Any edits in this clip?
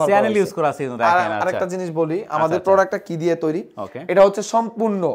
no; 0 cuts

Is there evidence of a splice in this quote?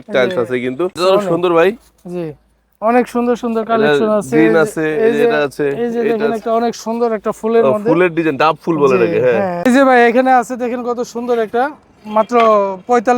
yes; 2 cuts; at 1.0 s, 9.6 s

